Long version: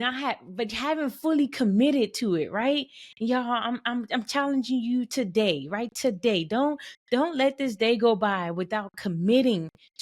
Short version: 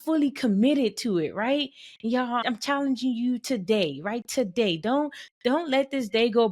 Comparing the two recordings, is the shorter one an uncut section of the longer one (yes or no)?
no